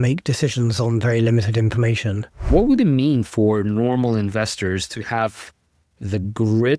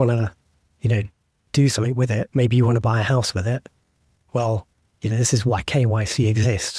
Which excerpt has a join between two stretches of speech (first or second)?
first